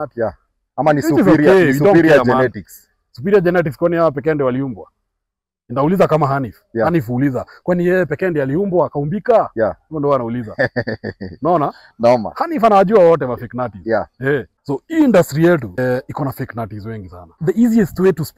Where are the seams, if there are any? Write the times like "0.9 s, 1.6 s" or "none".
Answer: 14.5 s, 15.8 s, 17.3 s